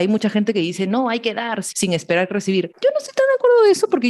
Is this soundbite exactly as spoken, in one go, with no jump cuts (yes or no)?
no